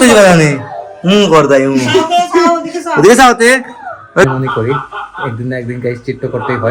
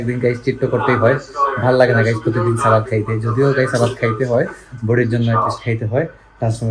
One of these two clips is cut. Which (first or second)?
first